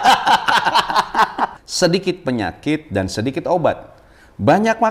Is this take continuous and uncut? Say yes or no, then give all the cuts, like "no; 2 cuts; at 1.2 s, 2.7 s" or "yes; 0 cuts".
no; 1 cut; at 1.6 s